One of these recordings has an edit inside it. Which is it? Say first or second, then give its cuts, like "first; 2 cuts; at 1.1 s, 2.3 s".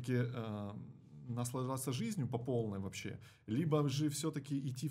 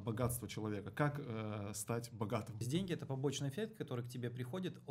second; 1 cut; at 2.7 s